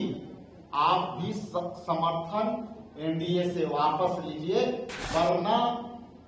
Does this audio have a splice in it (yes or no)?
yes